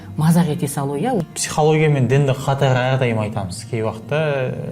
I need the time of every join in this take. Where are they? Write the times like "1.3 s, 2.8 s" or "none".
1.2 s